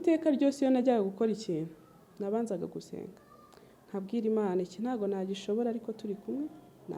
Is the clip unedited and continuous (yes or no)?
yes